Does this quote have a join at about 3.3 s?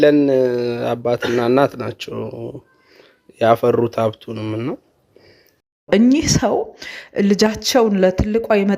no; 1 cut; at 5.6 s

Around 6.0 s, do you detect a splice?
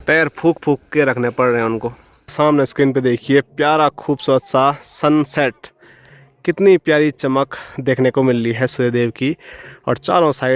no; 1 cut; at 2.3 s

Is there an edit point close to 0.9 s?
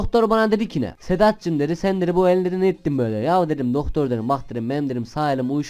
yes; 1 cut; at 0.9 s

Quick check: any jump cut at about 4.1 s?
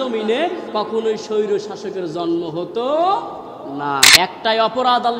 yes; 1 cut; at 4.1 s

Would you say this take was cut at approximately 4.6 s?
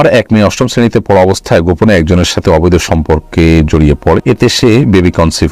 yes; 1 cut; at 4.6 s

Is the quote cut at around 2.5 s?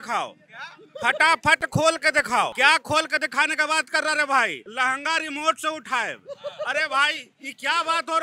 yes; 1 cut; at 2.5 s

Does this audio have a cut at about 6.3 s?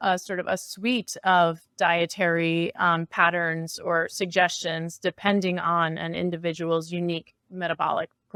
no; 0 cuts

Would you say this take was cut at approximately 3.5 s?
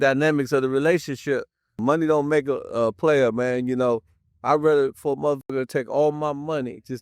no; 1 cut; at 1.8 s

